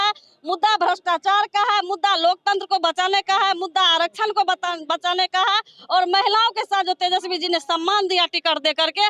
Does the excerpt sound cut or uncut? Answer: uncut